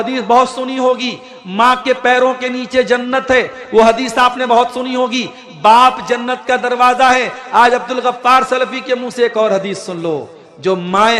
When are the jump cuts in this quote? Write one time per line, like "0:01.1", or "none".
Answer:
none